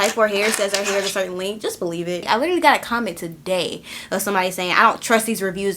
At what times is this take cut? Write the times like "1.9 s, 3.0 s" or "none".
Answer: 2.2 s